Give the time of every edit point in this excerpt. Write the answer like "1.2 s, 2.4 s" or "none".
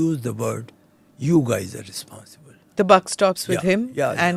none